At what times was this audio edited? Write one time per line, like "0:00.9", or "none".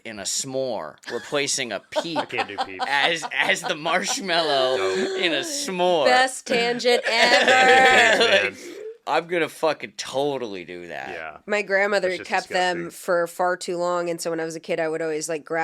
0:09.0
0:11.3